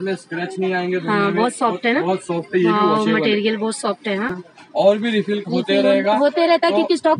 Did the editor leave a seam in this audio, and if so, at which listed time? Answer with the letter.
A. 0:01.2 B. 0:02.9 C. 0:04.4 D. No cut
C